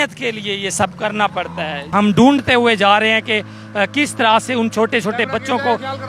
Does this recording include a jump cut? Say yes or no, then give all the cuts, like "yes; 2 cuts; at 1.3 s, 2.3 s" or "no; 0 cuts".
yes; 1 cut; at 1.9 s